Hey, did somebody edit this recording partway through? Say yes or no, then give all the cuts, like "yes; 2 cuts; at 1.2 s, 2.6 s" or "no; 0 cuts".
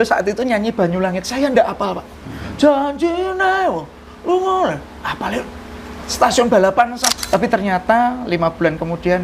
yes; 1 cut; at 7.0 s